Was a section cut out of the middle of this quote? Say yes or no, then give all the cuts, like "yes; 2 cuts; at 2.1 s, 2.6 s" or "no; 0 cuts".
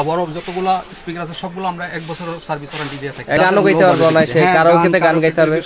yes; 1 cut; at 3.4 s